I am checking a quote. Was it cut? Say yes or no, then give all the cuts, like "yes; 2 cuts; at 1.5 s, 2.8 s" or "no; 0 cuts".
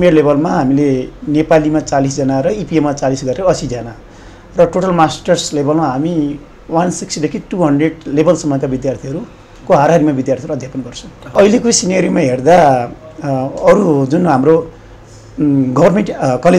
yes; 1 cut; at 11.3 s